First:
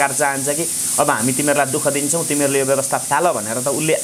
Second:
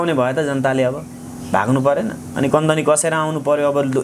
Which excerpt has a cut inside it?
second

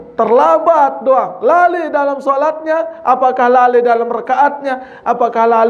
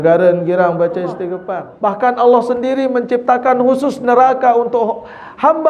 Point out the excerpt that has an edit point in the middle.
second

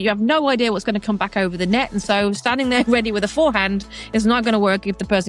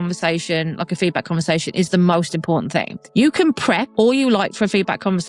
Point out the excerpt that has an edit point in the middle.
second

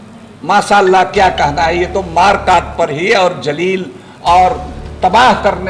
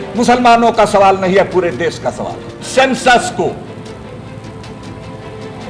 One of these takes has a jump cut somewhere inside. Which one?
second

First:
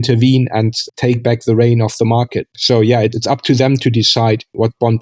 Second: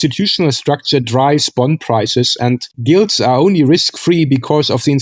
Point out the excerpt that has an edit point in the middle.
first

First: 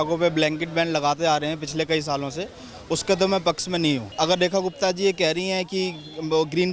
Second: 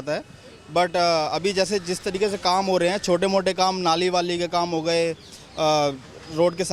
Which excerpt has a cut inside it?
first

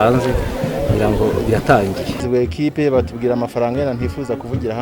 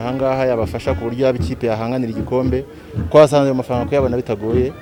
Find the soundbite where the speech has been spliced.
first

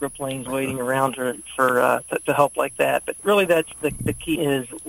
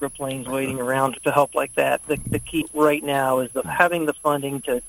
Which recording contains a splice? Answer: second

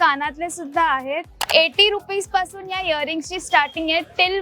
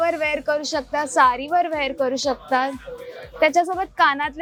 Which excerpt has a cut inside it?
first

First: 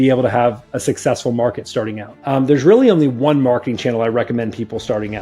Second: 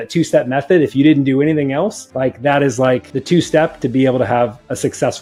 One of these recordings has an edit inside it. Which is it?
first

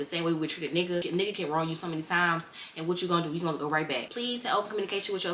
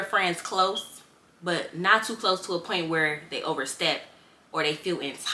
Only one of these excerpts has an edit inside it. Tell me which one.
first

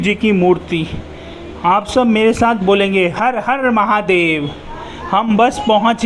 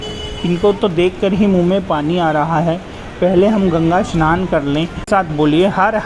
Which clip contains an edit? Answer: second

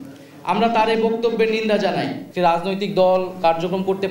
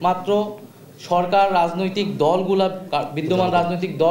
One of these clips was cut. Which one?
first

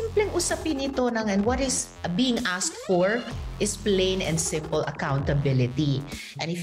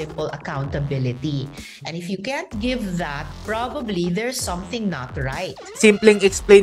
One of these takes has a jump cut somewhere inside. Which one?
second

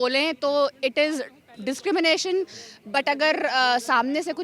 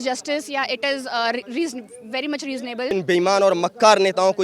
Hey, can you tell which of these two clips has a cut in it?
second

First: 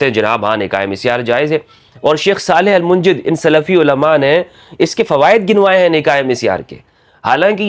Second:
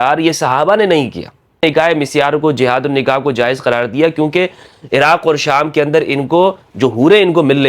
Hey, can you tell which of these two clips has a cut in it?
second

